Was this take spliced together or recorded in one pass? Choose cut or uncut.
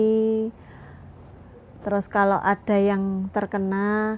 uncut